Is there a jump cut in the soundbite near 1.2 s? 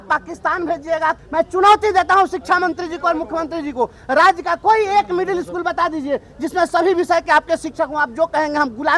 yes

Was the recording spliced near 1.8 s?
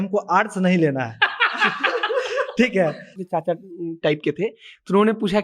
no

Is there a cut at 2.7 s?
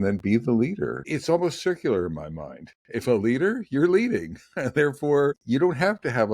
no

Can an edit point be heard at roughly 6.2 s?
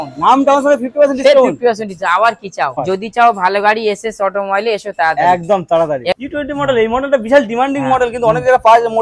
yes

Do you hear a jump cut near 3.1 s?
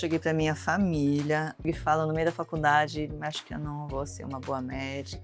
no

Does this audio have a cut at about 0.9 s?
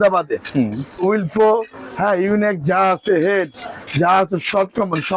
yes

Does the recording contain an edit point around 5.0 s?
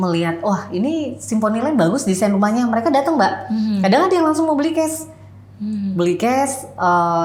no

